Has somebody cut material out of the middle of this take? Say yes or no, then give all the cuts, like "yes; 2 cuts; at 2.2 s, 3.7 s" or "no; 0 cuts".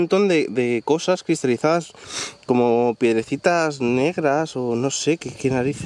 no; 0 cuts